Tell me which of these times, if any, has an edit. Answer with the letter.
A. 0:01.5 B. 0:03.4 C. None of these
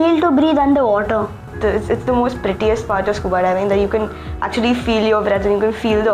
A